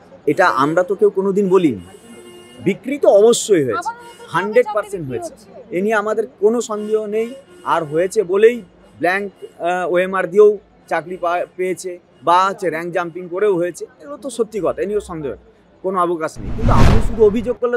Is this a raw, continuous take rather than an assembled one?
no; 1 cut; at 16.8 s

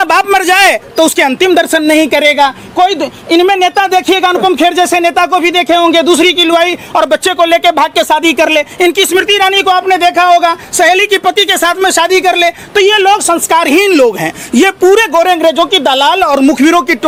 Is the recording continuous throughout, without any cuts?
yes; 0 cuts

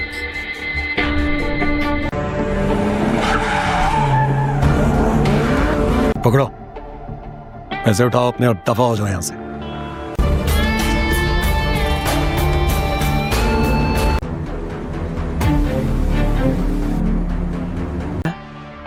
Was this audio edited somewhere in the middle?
no; 0 cuts

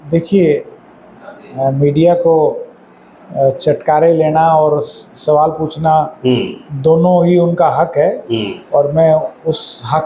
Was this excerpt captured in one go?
yes; 0 cuts

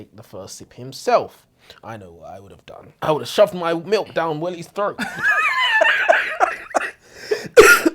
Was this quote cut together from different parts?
yes; 1 cut; at 2.9 s

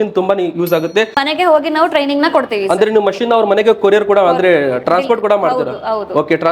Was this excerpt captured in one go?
no; 1 cut; at 1.1 s

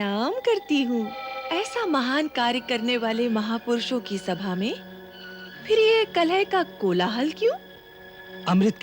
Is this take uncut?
no; 1 cut; at 1.4 s

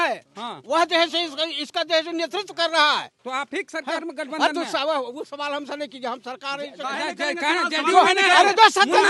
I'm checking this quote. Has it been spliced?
no; 0 cuts

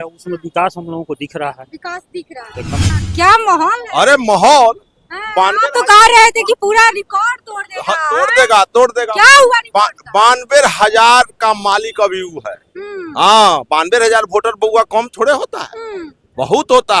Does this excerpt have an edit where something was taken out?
yes; 1 cut; at 2.9 s

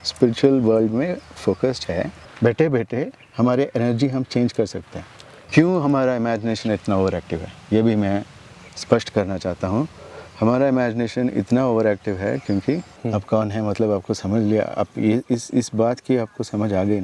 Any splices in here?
yes; 3 cuts; at 2.2 s, 5.3 s, 12.9 s

